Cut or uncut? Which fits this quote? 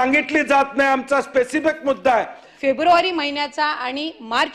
cut